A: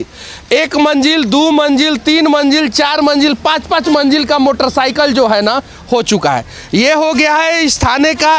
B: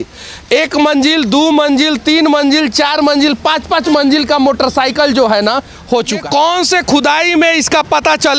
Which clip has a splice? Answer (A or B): B